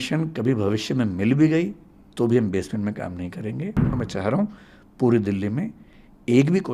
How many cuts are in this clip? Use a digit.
1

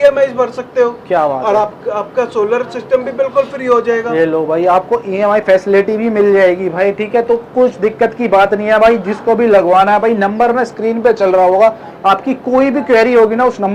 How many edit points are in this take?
0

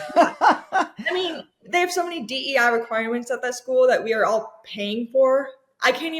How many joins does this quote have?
1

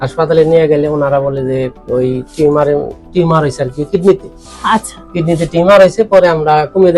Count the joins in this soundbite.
0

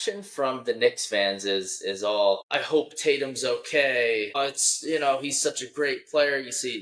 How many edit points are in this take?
2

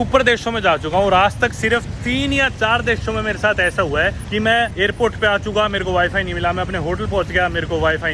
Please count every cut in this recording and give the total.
1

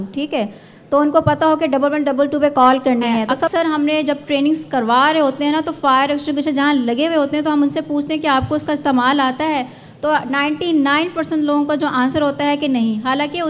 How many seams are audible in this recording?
1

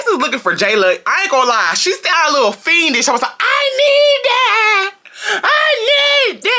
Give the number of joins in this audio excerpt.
0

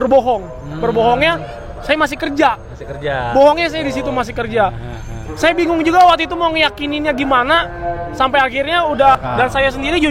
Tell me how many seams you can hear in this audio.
1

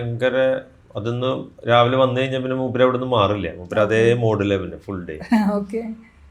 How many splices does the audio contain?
0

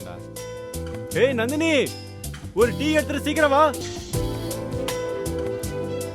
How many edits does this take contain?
1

